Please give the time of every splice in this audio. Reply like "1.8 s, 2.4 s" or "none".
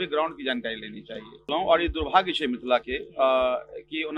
1.5 s